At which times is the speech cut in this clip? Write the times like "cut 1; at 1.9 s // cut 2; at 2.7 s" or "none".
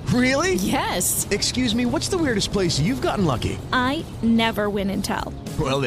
none